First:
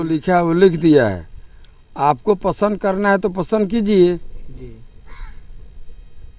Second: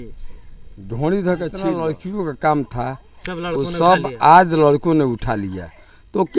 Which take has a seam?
second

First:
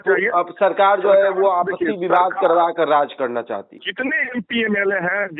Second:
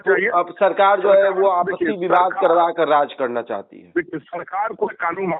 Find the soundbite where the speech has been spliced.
first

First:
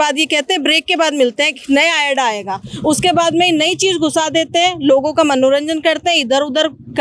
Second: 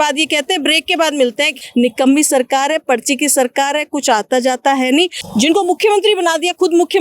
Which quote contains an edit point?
second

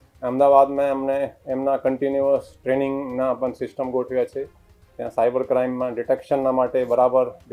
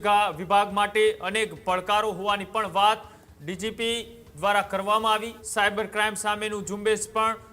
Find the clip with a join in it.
second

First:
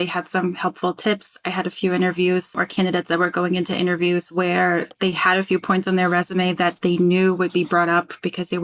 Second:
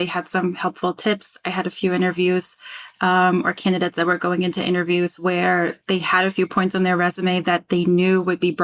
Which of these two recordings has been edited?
first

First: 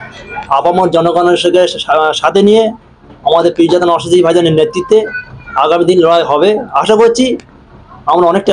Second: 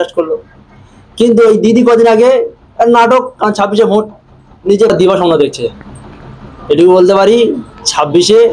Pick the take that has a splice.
second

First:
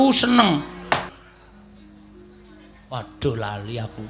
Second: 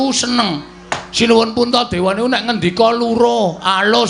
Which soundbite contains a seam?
first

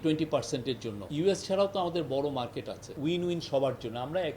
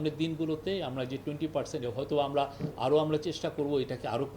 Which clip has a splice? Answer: first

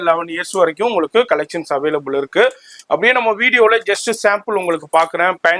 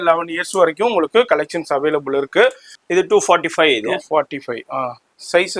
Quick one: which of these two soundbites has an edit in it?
second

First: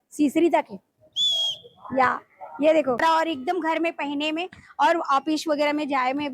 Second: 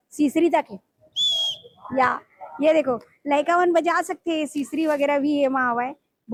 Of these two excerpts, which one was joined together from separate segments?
first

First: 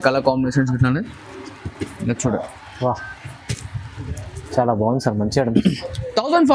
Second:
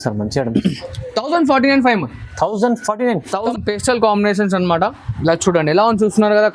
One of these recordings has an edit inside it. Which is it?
second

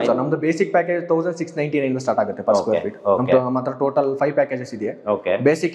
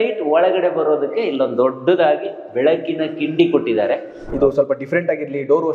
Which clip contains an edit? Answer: second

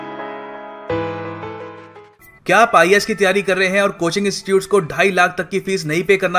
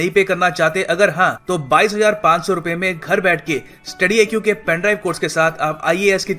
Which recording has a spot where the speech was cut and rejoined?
first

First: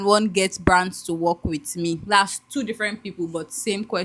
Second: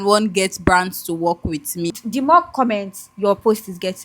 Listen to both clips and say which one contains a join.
second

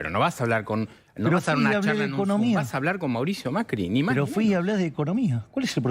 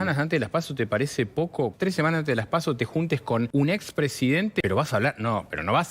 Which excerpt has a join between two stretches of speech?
second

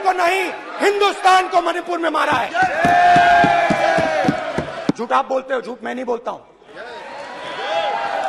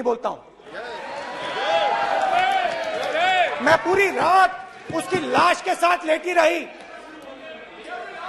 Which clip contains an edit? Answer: first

